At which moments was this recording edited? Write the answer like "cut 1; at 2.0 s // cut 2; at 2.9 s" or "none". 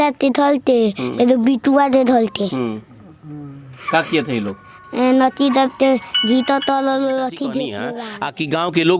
cut 1; at 7.9 s

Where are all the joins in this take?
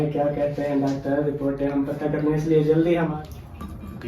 cut 1; at 3.1 s

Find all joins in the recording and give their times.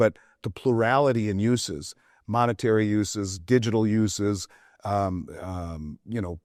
none

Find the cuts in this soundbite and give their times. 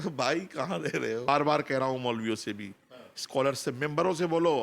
cut 1; at 1.3 s

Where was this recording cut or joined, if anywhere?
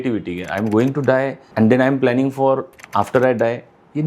cut 1; at 1.4 s // cut 2; at 2.8 s

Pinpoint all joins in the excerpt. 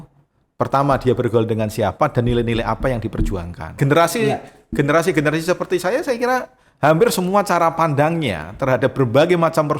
cut 1; at 3.8 s

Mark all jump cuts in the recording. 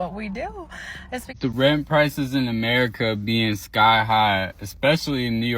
cut 1; at 1.4 s

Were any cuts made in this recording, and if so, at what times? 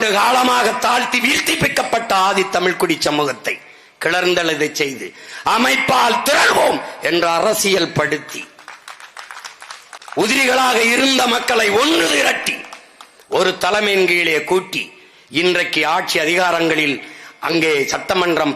cut 1; at 10.0 s

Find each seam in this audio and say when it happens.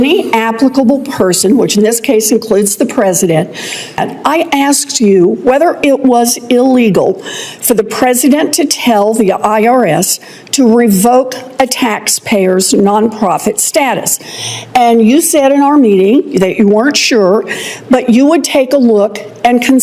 cut 1; at 4.0 s

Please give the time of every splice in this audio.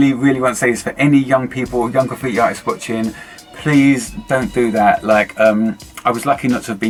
none

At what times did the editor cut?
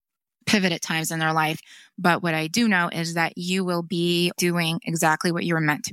cut 1; at 4.3 s

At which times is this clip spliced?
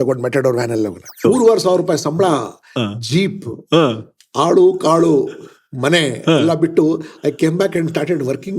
cut 1; at 1.2 s

